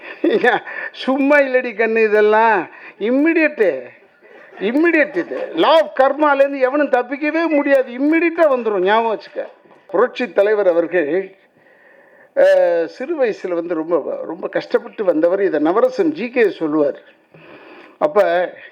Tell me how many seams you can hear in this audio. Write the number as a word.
one